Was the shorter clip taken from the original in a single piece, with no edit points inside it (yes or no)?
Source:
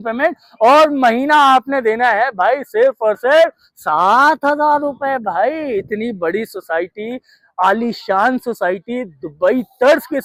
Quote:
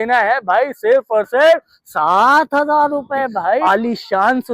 no